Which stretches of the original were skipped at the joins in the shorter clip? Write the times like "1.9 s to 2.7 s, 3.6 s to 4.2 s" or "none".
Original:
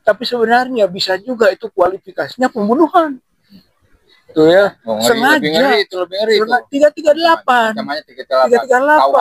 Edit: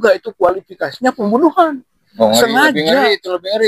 3.5 s to 4.8 s